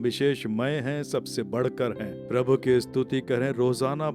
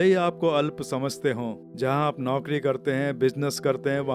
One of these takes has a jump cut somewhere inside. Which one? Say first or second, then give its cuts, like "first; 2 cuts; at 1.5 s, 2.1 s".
first; 1 cut; at 2.1 s